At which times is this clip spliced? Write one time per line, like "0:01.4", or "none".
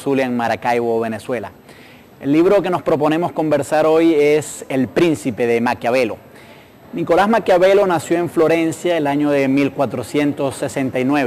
none